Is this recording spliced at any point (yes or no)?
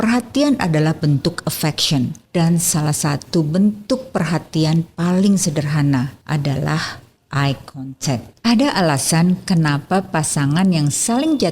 yes